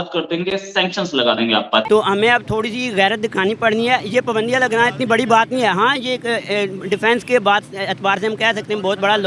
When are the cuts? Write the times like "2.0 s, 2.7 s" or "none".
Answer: 1.9 s